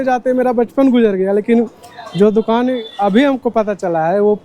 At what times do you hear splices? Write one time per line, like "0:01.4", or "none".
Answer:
none